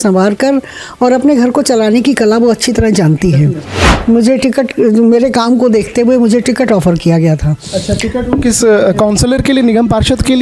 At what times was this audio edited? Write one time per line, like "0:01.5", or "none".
0:03.8

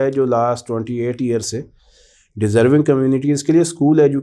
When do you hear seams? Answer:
none

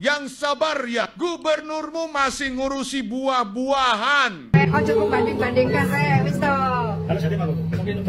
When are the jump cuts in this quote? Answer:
0:04.5

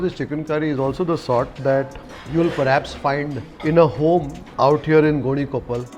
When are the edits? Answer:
0:03.4
0:04.4

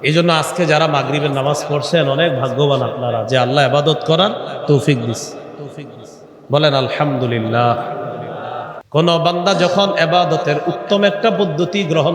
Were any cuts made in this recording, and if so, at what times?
0:08.7

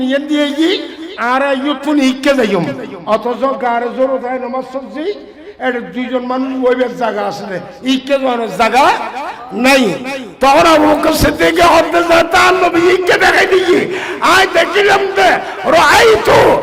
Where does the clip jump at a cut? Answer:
none

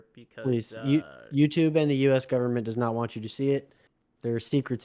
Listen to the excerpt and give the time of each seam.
none

